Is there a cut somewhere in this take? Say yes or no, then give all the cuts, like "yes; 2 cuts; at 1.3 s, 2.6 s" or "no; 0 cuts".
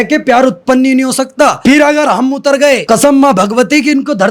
yes; 2 cuts; at 1.6 s, 2.8 s